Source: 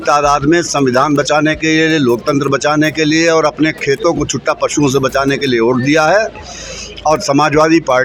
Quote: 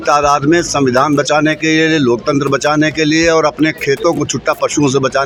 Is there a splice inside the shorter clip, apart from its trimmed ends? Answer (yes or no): no